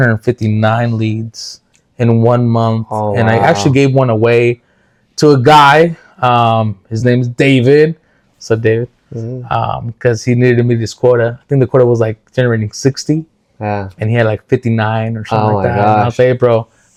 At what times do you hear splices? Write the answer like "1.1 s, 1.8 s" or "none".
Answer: none